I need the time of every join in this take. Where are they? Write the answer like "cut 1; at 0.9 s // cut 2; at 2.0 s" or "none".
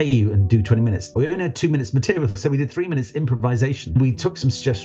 cut 1; at 1.1 s // cut 2; at 3.9 s